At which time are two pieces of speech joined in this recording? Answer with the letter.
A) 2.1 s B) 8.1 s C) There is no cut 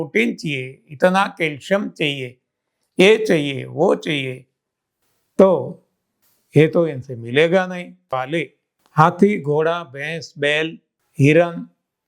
B